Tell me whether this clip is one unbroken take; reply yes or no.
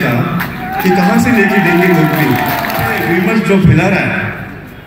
no